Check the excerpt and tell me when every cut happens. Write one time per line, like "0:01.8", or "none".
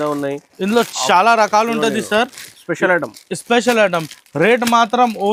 none